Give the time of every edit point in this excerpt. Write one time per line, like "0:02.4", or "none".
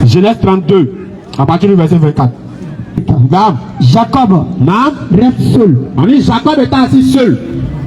0:03.0